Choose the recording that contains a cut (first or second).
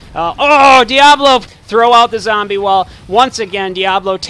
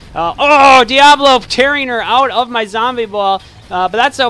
first